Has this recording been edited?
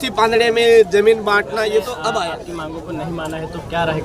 yes; 1 cut; at 2.4 s

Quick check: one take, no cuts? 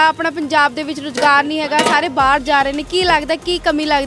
yes; 0 cuts

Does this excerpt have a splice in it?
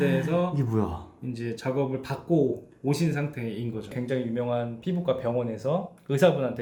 no; 0 cuts

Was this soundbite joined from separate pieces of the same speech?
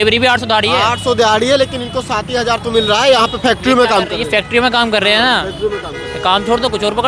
no; 0 cuts

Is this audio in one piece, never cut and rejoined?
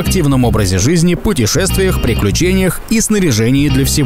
yes; 0 cuts

